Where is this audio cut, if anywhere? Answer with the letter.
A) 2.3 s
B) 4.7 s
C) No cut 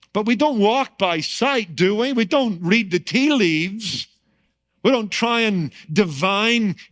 C